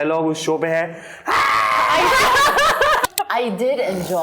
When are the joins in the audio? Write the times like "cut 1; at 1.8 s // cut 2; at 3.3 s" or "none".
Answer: cut 1; at 3.0 s